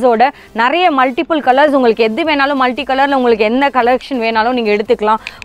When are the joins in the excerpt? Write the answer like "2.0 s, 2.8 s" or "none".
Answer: none